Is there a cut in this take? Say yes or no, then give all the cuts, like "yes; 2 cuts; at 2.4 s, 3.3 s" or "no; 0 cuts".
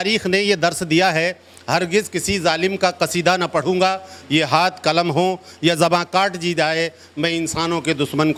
no; 0 cuts